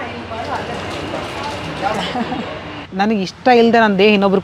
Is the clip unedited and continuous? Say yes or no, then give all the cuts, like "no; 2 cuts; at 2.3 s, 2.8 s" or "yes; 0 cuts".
no; 1 cut; at 2.8 s